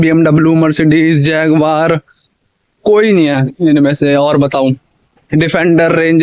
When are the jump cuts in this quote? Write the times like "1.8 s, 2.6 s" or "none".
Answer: none